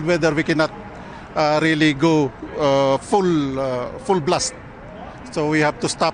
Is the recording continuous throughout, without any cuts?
yes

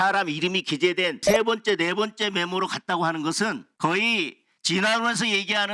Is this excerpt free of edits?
no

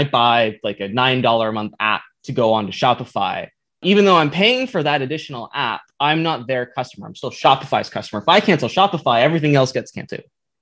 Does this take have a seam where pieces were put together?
no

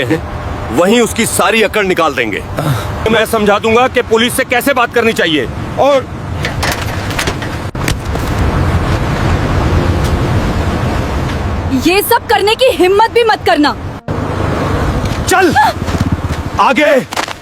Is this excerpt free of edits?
no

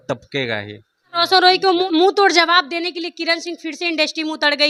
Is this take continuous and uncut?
yes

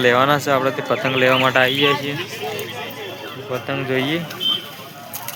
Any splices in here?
no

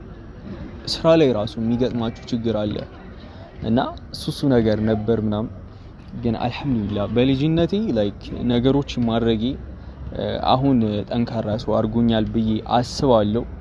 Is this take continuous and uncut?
yes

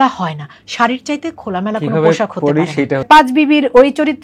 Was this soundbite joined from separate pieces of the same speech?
yes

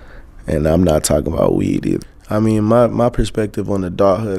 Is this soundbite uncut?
no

